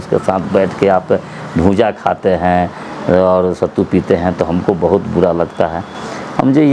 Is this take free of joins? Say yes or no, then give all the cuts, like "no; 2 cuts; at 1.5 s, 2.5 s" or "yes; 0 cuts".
yes; 0 cuts